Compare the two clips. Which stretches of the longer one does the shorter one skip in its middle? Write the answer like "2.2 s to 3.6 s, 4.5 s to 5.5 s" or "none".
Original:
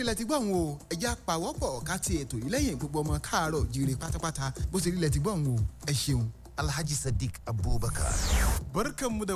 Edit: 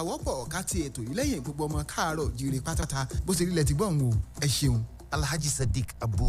4.2 s to 4.3 s